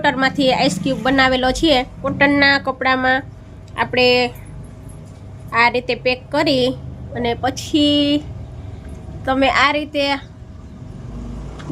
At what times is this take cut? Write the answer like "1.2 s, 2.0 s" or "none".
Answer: 2.1 s